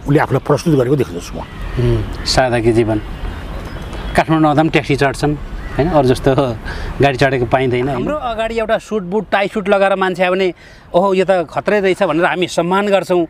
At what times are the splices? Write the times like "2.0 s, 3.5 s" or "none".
8.2 s